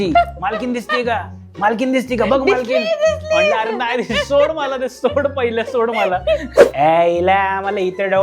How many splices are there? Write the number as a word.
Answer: one